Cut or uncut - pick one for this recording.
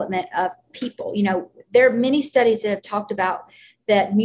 uncut